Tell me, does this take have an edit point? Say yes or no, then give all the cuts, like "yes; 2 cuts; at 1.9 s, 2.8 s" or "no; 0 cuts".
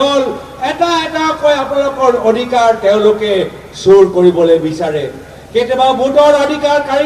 no; 0 cuts